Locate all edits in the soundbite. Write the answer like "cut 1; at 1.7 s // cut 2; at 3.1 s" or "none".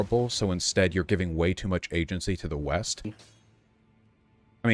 cut 1; at 3.1 s